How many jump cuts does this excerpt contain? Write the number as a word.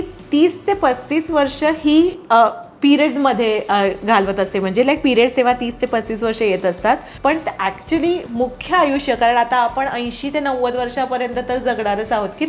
one